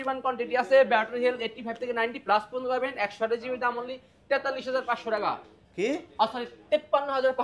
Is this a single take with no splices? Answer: yes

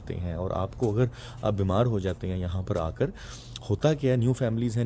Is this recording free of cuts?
yes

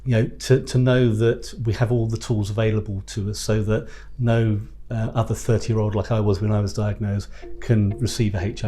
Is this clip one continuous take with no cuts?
yes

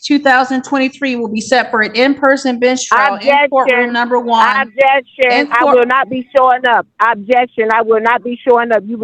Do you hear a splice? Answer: no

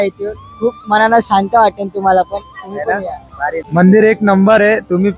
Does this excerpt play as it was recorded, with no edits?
no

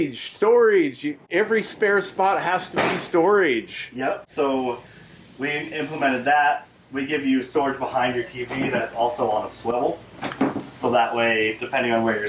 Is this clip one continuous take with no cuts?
yes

